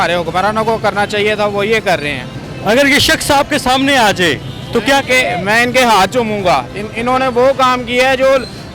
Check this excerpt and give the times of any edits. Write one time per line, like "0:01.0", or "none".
none